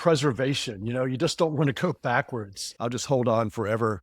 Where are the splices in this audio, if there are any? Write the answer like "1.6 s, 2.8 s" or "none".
2.6 s

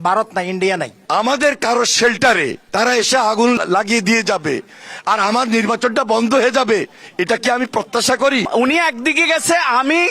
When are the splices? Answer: 0.9 s, 2.6 s, 3.6 s, 8.5 s

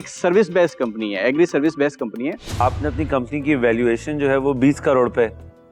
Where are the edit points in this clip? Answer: 2.6 s

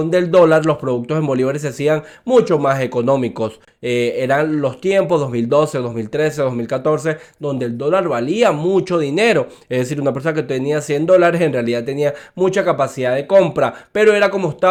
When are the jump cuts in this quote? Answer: none

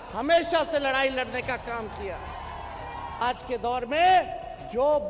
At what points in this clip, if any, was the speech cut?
3.2 s

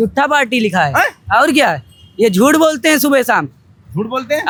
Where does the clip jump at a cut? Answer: none

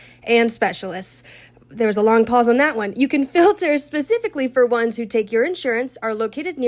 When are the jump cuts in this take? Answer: none

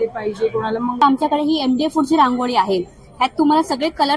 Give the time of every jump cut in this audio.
1.0 s

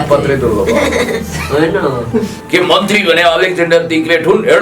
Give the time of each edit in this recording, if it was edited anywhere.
2.4 s

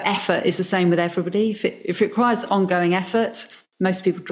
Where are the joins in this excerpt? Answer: none

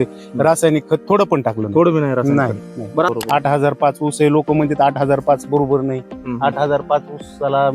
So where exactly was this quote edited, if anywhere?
3.1 s

